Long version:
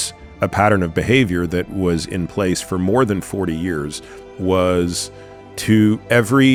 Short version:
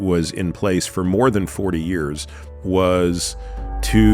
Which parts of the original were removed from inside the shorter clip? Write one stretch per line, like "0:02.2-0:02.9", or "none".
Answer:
none